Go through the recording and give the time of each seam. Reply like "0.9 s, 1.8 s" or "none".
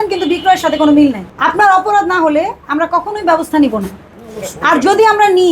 1.3 s